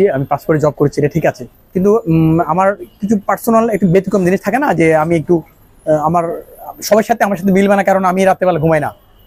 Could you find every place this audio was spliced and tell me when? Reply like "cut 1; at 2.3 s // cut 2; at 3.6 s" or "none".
none